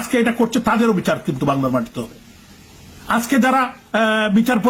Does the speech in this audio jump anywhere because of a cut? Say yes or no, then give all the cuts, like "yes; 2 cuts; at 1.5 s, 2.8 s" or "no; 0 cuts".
no; 0 cuts